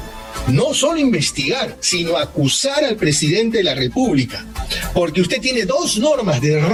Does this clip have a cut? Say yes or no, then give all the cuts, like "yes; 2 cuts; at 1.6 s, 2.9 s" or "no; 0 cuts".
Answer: no; 0 cuts